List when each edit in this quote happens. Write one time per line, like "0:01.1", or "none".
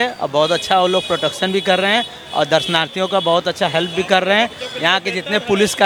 none